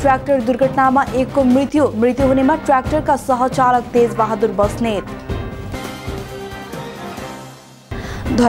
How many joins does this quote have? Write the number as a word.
zero